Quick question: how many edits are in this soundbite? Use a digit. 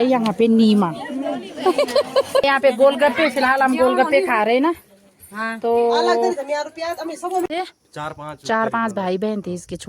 2